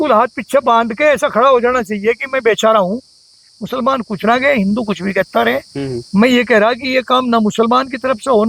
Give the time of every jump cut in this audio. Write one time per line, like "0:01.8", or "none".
none